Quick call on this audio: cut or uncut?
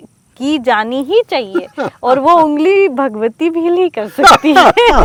uncut